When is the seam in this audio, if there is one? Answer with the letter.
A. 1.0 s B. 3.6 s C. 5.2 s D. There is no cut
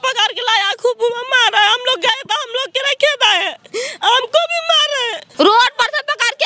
C